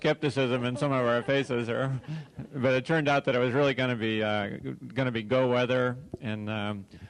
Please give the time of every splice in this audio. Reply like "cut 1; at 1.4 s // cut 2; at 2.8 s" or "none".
cut 1; at 4.0 s